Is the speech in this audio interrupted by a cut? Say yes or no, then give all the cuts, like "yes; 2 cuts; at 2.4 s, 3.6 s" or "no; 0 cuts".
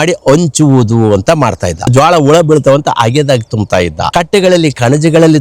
yes; 2 cuts; at 1.9 s, 4.1 s